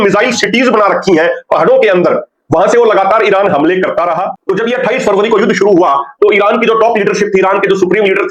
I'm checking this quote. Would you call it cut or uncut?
cut